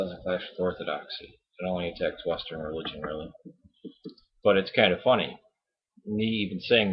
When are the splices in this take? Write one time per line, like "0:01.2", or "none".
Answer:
0:05.0